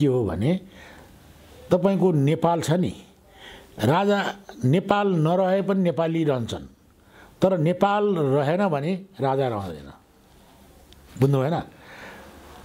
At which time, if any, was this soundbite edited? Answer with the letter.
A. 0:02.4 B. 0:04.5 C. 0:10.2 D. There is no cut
D